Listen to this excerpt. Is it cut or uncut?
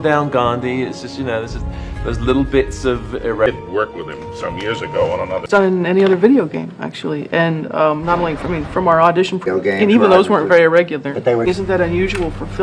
cut